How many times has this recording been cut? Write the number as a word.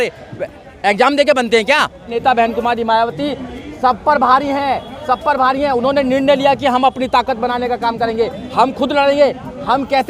one